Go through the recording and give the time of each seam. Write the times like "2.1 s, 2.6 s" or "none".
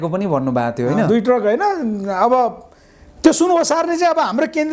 none